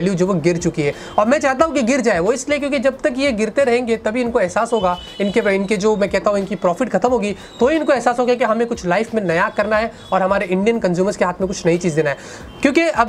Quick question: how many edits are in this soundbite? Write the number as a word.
zero